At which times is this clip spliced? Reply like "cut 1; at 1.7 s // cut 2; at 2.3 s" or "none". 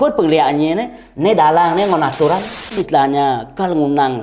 cut 1; at 2.8 s

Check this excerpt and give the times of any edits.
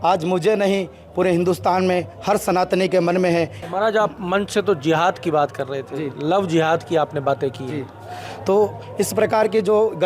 cut 1; at 3.6 s

